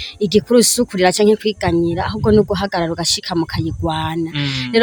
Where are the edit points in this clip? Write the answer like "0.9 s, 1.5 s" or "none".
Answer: none